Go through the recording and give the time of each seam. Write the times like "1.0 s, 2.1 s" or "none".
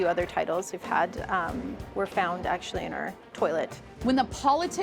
3.8 s